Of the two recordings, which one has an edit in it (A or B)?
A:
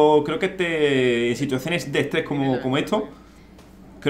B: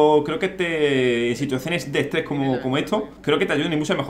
B